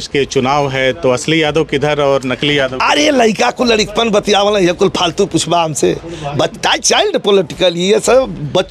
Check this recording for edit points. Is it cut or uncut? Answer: uncut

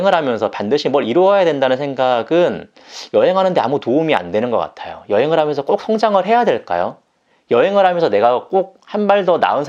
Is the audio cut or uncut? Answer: uncut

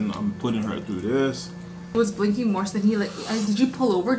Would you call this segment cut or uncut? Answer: cut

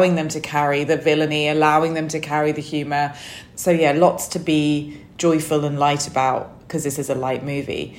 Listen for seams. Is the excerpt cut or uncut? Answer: cut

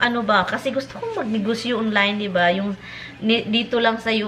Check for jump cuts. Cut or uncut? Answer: uncut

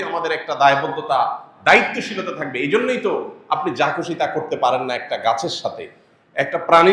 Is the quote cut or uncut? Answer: uncut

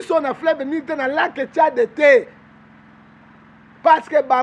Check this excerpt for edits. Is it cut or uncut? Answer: uncut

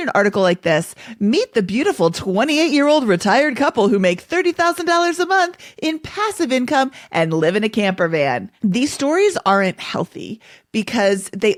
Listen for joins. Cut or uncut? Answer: uncut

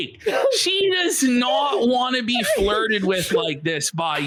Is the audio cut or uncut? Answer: uncut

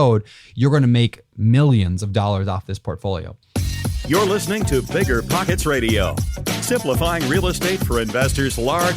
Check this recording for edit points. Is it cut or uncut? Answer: cut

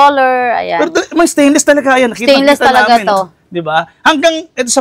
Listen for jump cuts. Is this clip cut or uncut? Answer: uncut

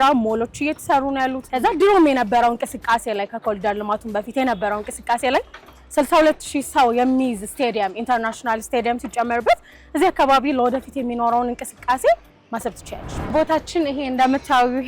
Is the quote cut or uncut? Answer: cut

